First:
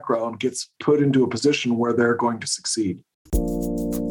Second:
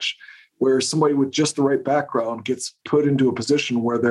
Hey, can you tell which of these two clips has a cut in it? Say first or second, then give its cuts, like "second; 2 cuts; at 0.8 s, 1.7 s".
first; 1 cut; at 3.1 s